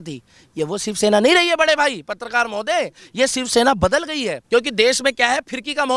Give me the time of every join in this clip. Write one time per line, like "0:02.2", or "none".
0:04.4

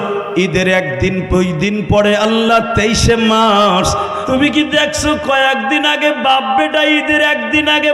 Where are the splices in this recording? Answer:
0:04.2

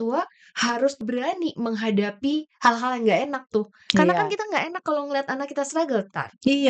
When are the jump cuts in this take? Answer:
0:01.0

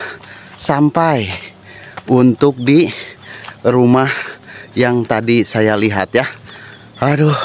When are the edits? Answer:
none

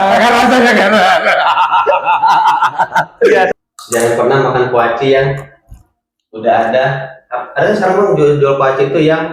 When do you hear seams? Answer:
0:03.5

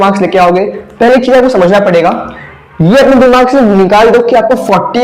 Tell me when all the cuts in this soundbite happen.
none

